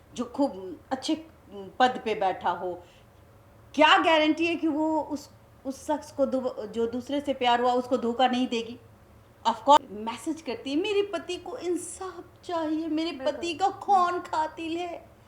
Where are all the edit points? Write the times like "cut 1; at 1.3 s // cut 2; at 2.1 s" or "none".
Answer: cut 1; at 9.8 s